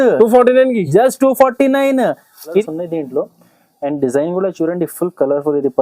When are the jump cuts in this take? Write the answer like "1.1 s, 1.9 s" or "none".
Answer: 2.6 s